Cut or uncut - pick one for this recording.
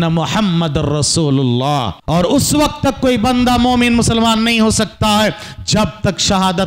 cut